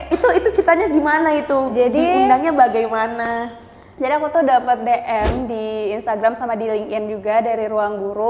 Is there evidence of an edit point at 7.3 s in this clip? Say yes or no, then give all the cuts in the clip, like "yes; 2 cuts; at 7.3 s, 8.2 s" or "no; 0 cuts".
no; 0 cuts